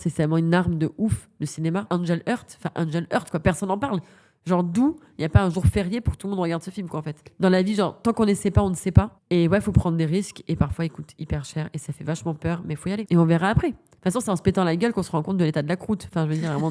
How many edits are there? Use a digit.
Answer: 2